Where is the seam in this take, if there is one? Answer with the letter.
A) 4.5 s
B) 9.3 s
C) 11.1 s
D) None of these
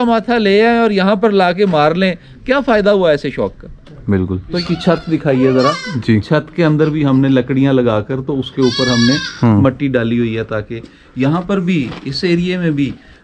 A